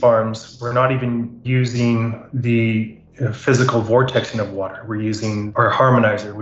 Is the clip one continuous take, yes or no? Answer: no